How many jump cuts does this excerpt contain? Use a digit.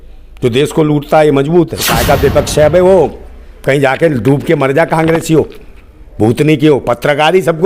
1